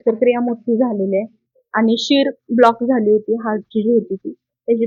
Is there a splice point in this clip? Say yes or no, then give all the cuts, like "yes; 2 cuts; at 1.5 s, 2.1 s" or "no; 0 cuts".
no; 0 cuts